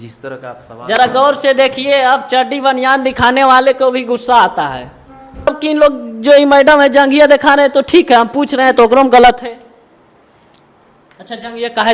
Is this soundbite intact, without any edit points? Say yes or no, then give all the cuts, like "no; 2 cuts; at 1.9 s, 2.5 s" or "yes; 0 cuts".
no; 1 cut; at 5.5 s